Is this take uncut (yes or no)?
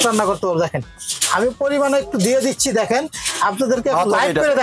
yes